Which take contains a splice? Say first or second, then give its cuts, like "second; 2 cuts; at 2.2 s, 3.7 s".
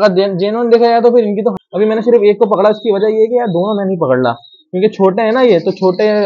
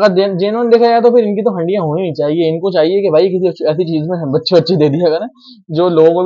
first; 1 cut; at 1.6 s